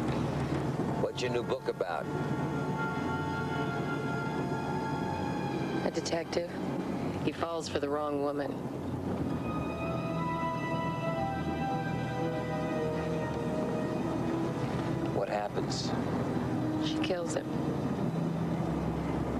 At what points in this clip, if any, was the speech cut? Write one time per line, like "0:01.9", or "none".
0:13.2